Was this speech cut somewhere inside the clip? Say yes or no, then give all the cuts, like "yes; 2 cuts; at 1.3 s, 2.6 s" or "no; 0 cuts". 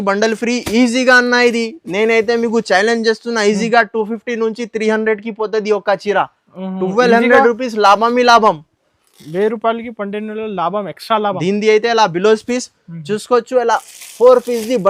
no; 0 cuts